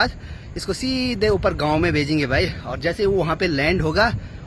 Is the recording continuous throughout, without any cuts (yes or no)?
yes